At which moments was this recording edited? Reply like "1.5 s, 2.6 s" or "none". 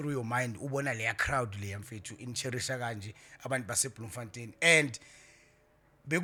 none